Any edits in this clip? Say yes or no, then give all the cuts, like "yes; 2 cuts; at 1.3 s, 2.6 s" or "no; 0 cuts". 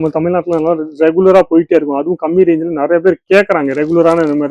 no; 0 cuts